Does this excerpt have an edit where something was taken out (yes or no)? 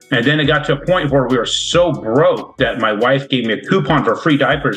no